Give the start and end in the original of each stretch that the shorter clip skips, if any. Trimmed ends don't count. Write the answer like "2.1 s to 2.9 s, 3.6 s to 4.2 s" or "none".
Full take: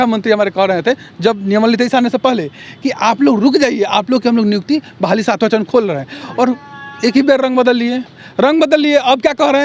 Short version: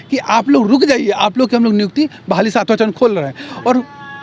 none